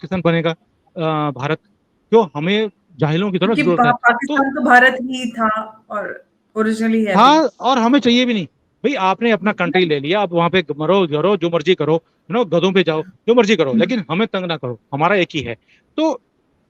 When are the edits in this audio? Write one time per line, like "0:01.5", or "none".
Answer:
none